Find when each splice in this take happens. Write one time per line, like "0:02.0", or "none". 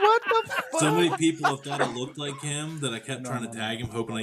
none